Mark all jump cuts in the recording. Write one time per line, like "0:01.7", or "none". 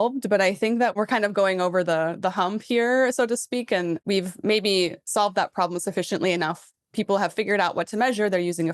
0:01.0
0:04.0